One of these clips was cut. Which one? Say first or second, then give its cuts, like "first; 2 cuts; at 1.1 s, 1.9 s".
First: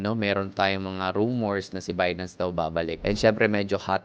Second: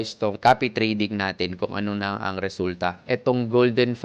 second; 1 cut; at 3.0 s